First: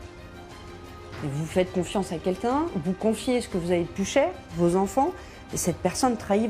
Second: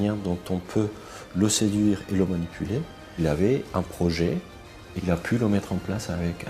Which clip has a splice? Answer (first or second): second